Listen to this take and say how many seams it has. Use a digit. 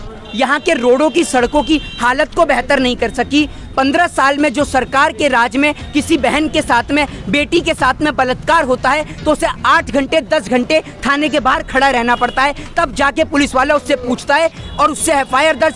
0